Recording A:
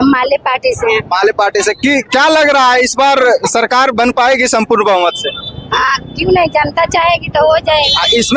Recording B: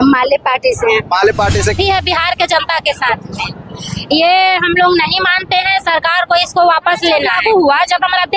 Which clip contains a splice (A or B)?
B